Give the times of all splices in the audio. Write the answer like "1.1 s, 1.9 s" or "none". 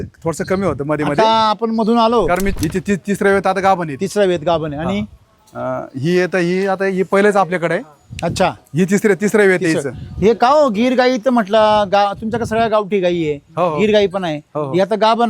2.5 s